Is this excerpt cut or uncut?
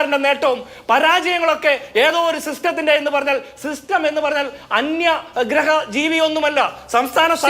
uncut